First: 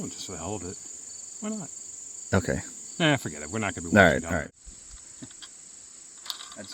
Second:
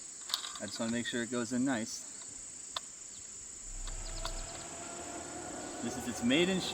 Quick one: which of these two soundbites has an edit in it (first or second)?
first